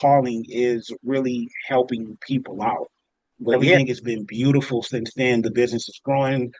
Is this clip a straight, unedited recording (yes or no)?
no